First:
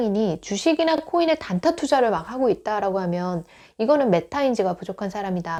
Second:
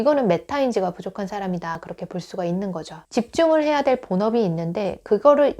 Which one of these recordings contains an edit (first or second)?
second